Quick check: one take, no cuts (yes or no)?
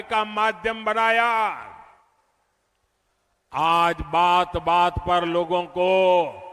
yes